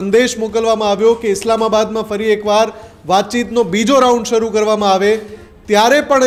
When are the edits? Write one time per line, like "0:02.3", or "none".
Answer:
none